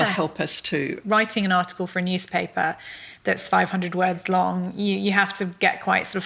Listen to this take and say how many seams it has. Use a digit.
1